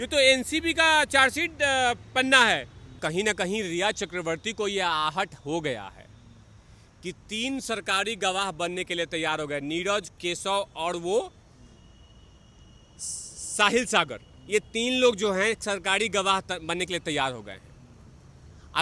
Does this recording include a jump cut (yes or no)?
yes